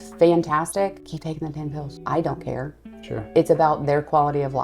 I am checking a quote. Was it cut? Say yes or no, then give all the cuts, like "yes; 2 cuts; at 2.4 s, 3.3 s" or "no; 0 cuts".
no; 0 cuts